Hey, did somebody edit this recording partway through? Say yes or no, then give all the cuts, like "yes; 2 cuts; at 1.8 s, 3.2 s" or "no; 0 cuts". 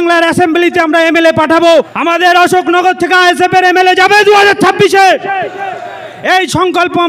yes; 1 cut; at 1.9 s